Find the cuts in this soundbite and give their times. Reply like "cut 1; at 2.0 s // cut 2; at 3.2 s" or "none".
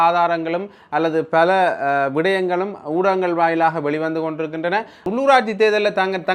cut 1; at 5.1 s